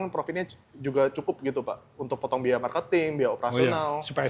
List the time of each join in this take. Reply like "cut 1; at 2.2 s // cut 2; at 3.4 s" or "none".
none